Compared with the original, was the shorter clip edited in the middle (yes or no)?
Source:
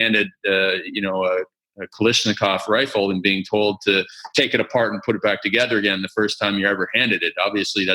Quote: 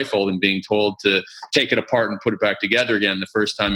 no